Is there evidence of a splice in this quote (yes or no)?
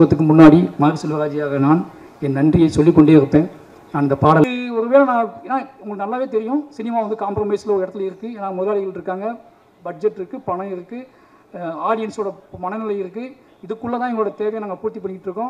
yes